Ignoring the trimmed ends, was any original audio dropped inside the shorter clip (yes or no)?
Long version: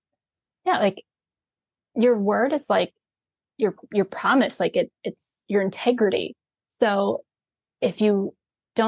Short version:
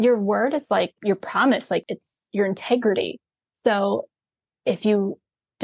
yes